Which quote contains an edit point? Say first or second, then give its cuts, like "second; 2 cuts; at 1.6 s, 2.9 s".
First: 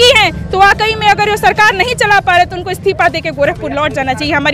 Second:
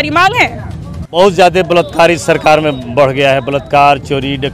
second; 1 cut; at 1.1 s